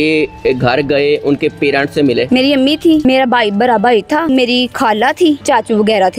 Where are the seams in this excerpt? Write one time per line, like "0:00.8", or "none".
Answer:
0:02.3
0:03.1
0:04.3
0:05.4